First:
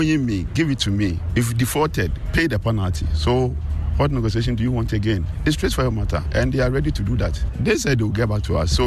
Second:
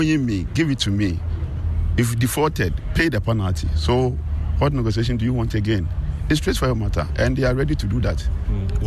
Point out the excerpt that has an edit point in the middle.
first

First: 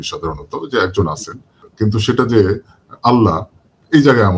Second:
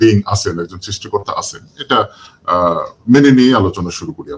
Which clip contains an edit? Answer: first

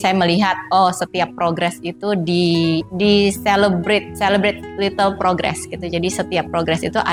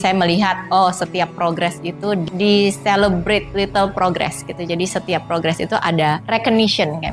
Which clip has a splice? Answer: second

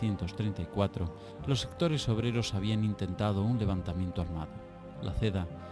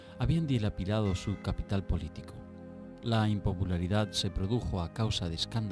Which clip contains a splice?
second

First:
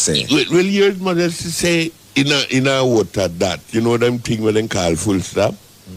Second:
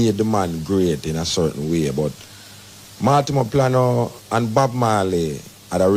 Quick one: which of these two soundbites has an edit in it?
first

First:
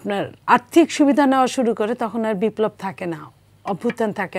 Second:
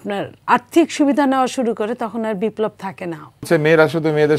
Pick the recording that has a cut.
second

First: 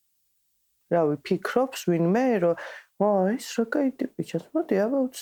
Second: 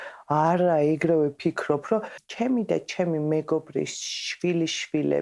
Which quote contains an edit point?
second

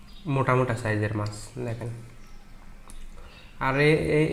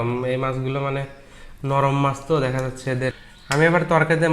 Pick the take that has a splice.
second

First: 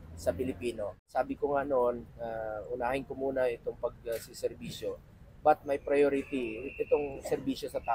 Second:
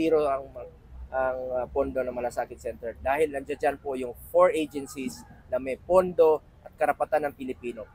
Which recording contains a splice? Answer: first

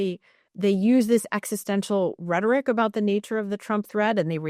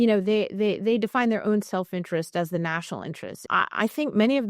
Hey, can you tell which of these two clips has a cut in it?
second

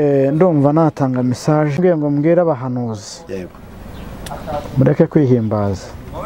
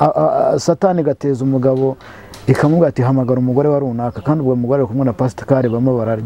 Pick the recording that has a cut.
first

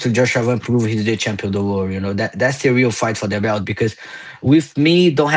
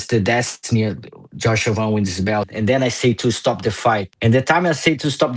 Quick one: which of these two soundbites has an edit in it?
second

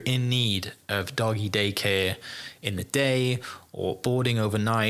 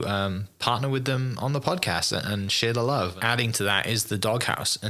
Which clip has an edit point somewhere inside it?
second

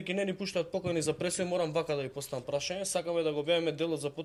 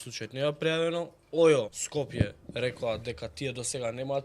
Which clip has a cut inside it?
second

